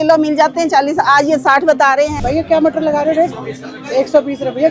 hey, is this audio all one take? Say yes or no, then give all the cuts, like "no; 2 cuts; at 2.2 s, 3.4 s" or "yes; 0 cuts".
no; 1 cut; at 2.1 s